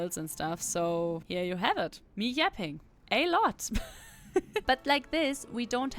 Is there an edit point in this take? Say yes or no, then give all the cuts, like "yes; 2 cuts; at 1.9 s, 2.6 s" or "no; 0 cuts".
yes; 3 cuts; at 1.2 s, 2.0 s, 4.6 s